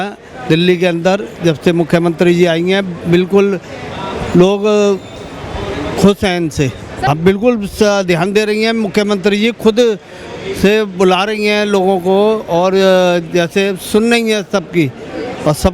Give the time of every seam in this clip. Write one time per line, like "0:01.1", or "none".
0:07.1